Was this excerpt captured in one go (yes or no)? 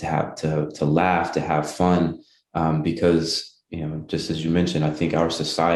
yes